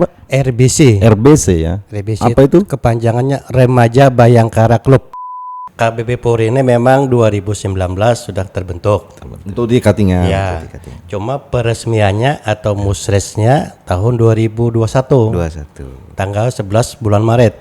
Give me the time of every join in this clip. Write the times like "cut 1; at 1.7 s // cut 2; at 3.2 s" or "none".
cut 1; at 5.6 s